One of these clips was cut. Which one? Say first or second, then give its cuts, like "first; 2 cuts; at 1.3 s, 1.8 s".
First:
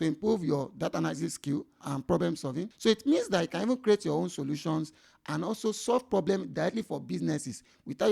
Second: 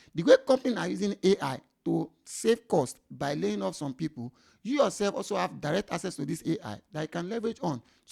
first; 2 cuts; at 1.8 s, 2.7 s